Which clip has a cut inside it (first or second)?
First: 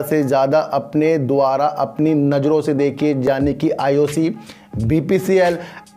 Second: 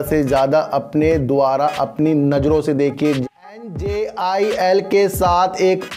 second